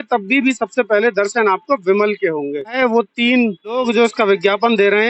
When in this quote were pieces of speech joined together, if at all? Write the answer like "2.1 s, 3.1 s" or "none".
2.7 s, 3.7 s

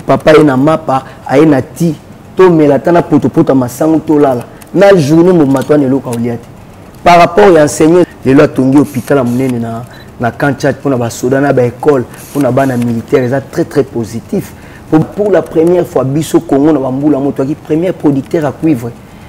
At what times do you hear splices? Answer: 8.1 s, 15.0 s

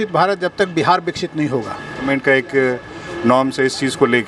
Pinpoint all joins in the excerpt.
2.0 s

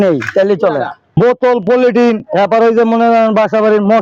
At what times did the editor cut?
1.1 s

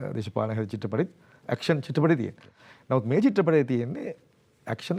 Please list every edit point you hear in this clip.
none

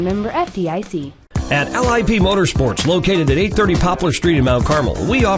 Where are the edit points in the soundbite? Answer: 1.1 s

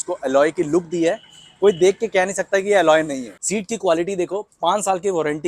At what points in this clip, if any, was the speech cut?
3.2 s

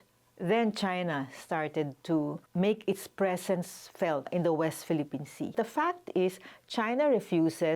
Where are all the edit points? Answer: 5.5 s

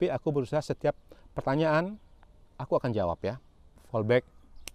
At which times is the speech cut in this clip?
3.7 s

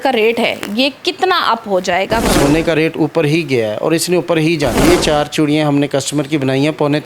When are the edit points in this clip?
2.2 s, 4.8 s

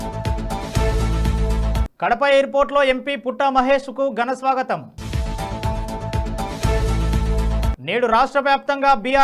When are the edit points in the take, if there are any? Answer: 1.9 s

